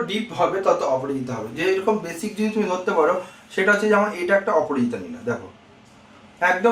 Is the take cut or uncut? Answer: uncut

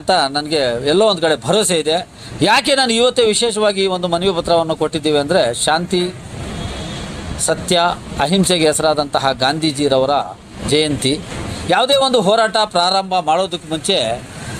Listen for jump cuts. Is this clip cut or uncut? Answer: uncut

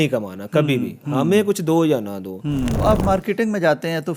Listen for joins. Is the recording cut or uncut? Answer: cut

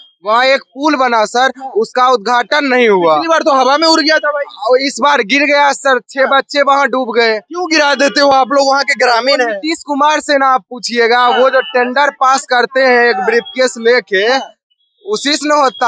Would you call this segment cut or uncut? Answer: uncut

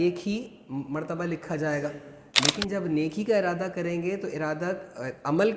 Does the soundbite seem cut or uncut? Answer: uncut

